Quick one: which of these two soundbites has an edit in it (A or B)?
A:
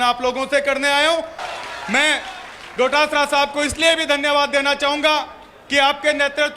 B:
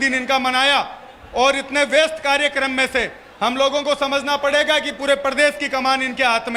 A